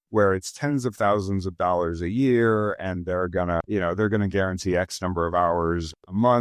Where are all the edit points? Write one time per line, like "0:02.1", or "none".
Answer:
none